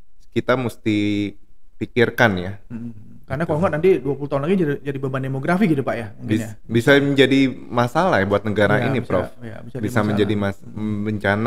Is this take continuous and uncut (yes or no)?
yes